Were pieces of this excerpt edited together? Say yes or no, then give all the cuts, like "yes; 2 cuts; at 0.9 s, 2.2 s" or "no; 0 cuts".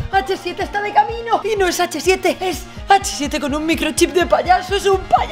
yes; 2 cuts; at 1.4 s, 2.4 s